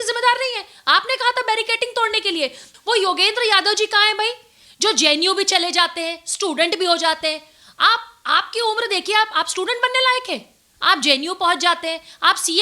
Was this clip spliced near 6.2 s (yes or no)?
no